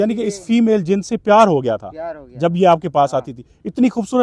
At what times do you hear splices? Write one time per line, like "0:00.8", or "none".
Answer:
none

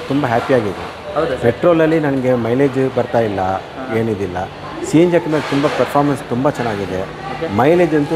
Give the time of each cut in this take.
none

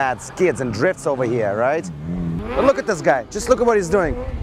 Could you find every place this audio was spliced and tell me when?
0:02.2

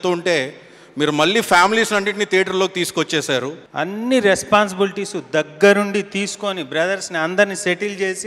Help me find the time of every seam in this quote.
0:03.6

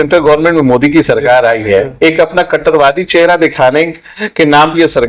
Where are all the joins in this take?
none

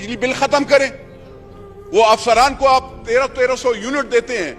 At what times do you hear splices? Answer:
none

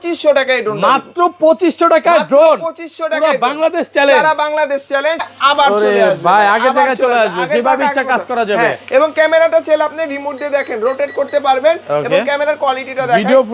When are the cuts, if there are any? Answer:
0:05.3

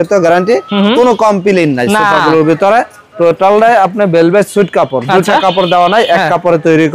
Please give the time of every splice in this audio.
none

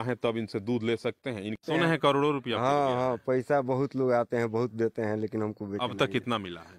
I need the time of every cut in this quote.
0:01.6

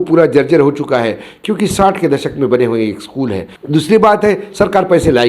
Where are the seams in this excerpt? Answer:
0:03.5

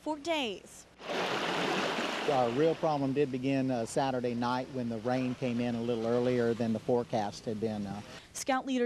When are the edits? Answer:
none

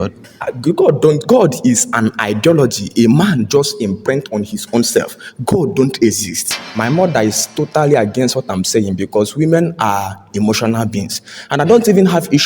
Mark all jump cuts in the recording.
0:06.6

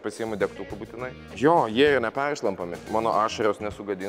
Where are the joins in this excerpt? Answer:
0:02.8

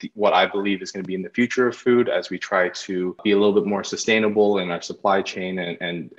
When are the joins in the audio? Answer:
0:03.2

